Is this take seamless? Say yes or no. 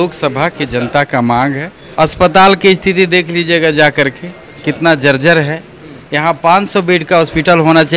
no